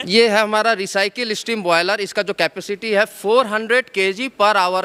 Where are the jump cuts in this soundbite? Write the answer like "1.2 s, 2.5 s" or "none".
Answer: none